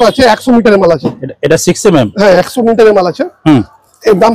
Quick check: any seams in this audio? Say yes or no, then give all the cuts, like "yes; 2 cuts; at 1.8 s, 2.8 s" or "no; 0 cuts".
no; 0 cuts